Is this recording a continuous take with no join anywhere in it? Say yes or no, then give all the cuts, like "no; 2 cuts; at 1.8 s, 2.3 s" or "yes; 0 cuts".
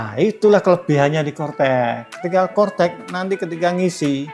yes; 0 cuts